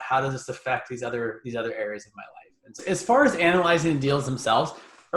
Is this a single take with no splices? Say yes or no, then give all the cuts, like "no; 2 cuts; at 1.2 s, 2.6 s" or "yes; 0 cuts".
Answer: no; 1 cut; at 2.8 s